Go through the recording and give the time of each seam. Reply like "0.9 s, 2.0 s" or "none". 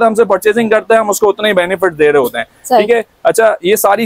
none